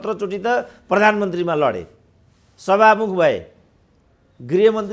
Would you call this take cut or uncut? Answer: uncut